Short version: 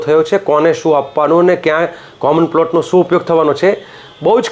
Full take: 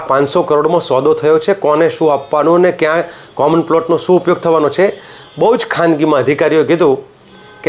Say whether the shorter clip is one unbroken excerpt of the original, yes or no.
yes